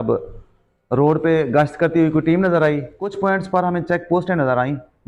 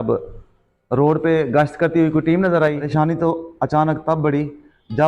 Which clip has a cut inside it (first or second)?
second